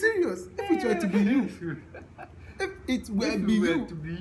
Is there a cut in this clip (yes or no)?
yes